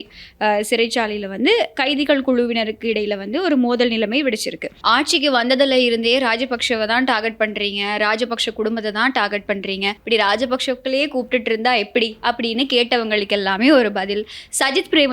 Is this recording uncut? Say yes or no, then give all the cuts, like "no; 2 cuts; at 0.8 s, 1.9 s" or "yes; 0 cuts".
no; 2 cuts; at 4.7 s, 10.0 s